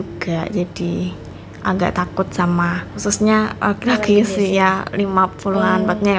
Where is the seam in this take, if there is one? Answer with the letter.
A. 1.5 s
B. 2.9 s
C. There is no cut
B